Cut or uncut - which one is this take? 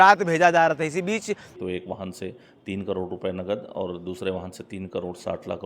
cut